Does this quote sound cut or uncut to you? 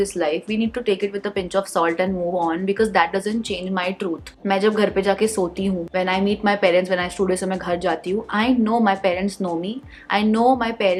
uncut